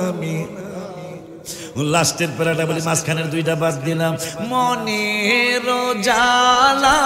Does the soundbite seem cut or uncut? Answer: uncut